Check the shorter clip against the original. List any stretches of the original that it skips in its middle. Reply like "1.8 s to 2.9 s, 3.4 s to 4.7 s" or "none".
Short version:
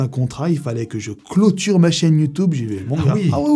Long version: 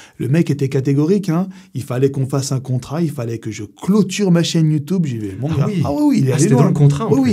none